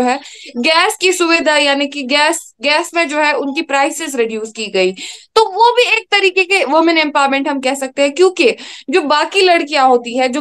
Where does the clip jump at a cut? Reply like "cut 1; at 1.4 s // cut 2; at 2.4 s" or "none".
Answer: none